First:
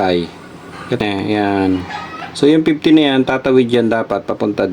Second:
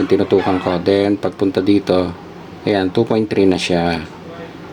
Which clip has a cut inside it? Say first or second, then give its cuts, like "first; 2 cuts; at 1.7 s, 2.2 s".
first; 1 cut; at 1.0 s